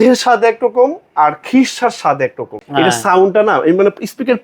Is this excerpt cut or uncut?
cut